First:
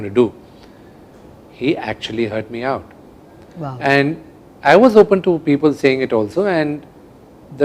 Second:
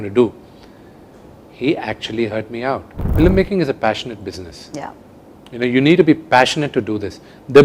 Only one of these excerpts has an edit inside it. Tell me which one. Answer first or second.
second